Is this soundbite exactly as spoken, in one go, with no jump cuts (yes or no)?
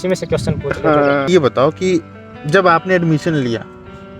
no